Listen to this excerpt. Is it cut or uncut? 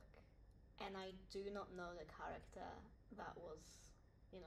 cut